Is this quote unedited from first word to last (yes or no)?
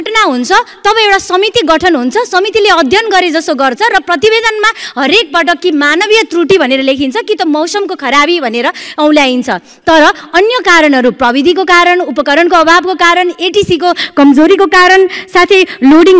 yes